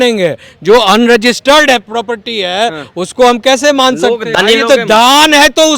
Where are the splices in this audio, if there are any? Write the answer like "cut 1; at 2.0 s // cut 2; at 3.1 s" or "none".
cut 1; at 4.3 s